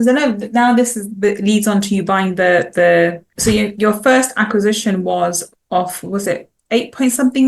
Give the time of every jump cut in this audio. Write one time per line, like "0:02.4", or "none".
0:03.3